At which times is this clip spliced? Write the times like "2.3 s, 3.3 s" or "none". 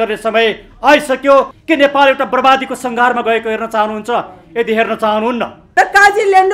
1.5 s, 5.6 s